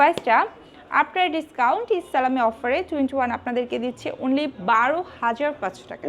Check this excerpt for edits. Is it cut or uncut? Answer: uncut